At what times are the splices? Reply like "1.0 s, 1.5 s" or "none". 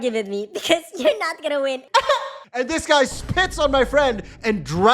2.4 s